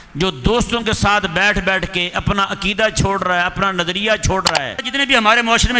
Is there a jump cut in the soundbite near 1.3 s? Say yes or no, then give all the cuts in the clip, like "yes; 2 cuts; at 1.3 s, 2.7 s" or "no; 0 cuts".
no; 1 cut; at 4.9 s